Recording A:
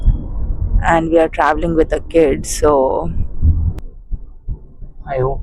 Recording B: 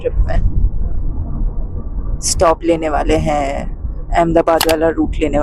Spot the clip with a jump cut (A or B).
A